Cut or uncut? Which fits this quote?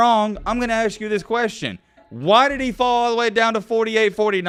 uncut